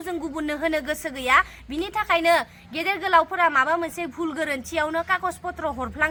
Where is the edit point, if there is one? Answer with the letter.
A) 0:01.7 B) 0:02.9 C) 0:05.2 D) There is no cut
D